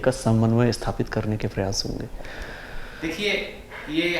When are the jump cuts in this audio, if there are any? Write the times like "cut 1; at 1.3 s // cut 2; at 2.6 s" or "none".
none